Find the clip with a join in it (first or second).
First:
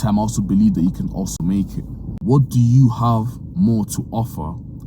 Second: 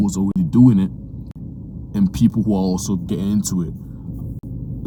first